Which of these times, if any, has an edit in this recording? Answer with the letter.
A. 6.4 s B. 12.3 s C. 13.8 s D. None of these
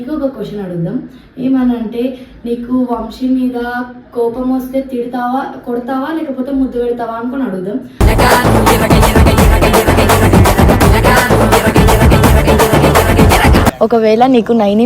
C